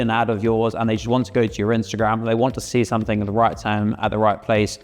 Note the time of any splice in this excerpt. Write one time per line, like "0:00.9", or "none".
none